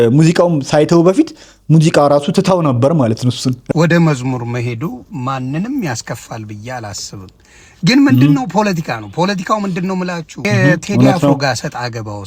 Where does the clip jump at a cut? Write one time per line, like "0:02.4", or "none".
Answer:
0:03.6
0:10.4

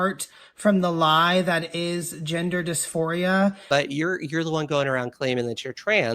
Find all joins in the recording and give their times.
0:03.6

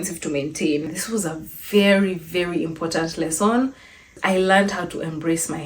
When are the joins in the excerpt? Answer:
0:01.0
0:04.2

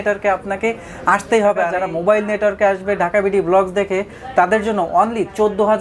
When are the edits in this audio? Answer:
0:01.8

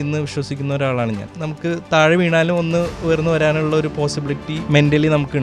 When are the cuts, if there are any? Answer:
0:01.3
0:02.9
0:04.5

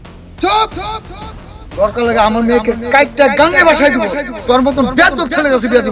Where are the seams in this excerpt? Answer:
none

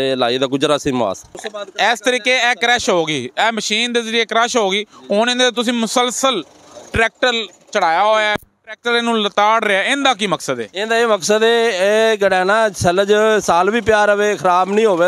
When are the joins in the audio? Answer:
0:01.3

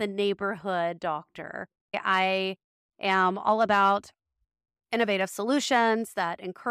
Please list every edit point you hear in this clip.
0:02.0

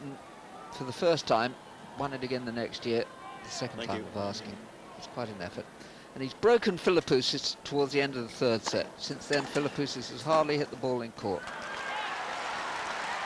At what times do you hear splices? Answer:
0:09.6

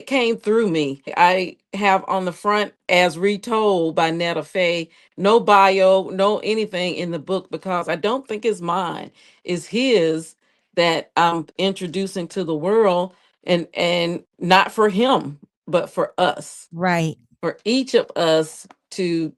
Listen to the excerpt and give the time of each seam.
0:01.1

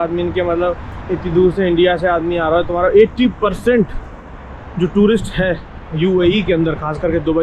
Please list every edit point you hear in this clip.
none

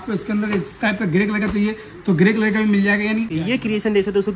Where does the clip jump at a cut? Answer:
0:03.3

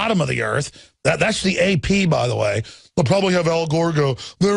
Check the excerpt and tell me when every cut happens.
0:02.9

